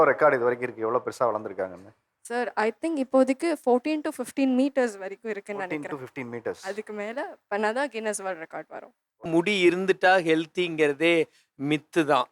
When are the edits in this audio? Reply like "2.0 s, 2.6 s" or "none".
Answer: 9.2 s